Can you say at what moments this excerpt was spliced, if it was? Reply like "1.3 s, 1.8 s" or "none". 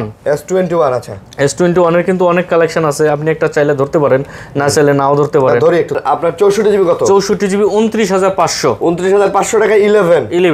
6.0 s